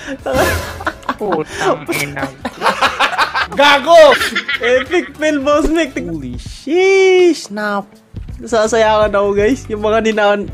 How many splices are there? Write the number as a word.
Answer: one